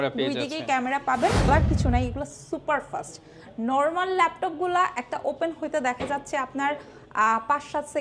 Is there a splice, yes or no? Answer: yes